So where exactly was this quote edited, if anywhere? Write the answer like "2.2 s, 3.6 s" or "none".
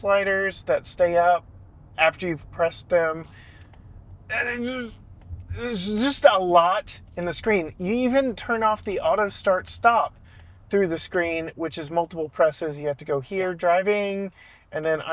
none